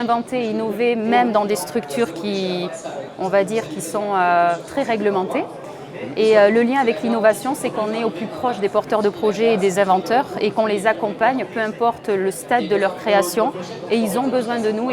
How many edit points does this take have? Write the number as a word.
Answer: zero